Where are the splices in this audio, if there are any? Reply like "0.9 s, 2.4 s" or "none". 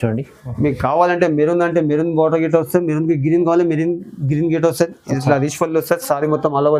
none